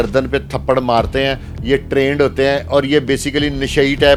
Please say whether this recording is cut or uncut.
uncut